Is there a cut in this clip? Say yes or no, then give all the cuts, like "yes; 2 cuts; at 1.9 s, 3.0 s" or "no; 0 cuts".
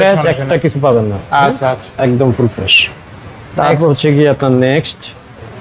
no; 0 cuts